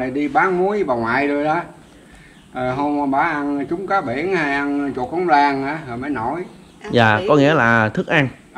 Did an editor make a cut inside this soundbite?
no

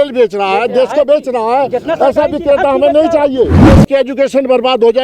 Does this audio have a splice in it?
yes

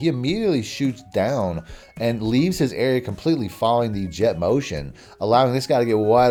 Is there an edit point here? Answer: no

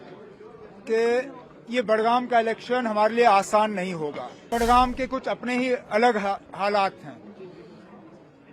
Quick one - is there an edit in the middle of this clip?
yes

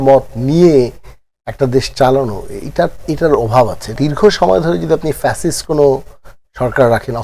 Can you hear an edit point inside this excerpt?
yes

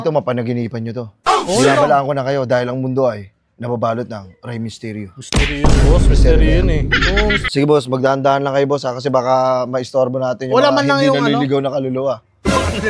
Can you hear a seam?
yes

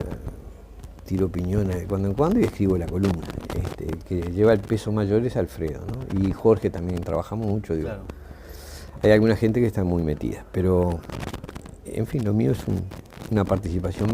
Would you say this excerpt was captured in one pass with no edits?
no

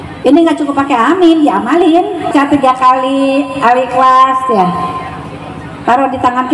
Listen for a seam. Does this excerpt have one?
yes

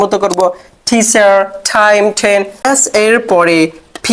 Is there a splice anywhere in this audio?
yes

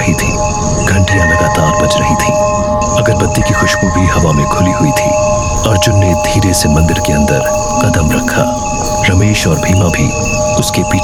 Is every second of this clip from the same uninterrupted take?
yes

